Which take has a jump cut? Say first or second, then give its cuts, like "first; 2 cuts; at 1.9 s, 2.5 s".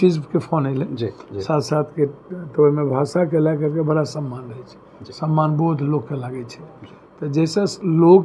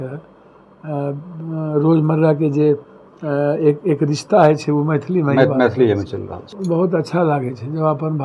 second; 1 cut; at 6.5 s